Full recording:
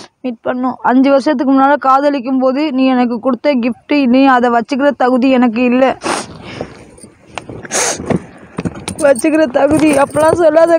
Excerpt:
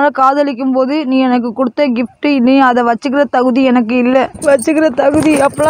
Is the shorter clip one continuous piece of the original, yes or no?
no